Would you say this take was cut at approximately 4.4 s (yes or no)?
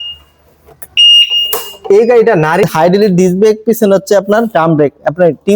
no